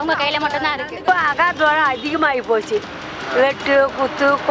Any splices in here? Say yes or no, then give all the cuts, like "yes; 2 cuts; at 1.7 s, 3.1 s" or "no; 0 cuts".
yes; 1 cut; at 0.9 s